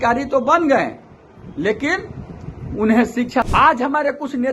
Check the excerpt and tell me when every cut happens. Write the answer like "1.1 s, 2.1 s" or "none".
3.4 s